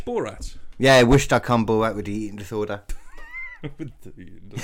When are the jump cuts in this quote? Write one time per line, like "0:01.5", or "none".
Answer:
0:03.0

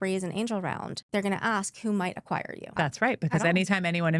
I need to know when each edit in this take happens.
0:00.9
0:02.7

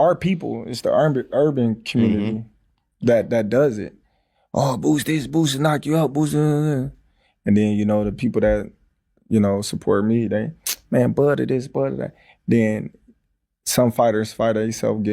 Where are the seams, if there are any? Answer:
none

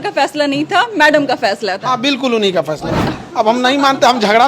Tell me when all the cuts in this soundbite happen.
0:03.1

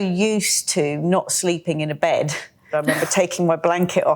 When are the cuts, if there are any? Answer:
0:02.7

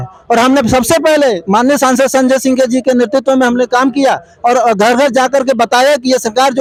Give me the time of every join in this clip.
none

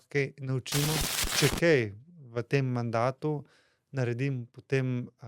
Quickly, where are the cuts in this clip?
0:01.2

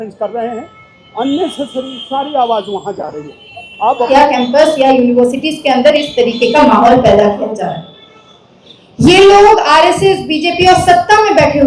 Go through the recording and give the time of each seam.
0:04.1

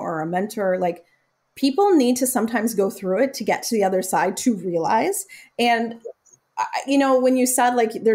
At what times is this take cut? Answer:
none

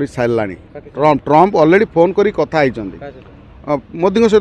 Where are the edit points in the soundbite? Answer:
none

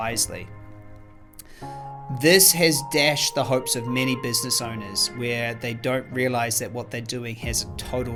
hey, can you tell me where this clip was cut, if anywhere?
none

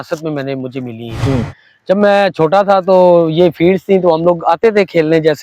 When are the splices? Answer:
none

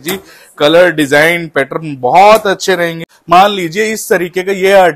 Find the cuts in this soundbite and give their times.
0:03.1

